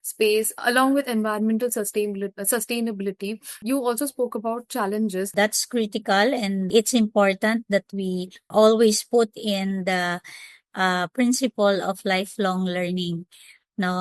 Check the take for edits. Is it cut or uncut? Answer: cut